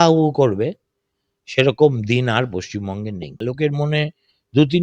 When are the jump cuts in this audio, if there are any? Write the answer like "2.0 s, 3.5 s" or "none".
3.3 s